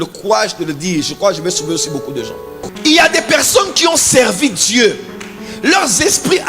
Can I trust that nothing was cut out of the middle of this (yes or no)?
no